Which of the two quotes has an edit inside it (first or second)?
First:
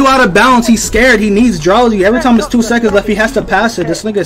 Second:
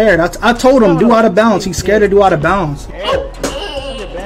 second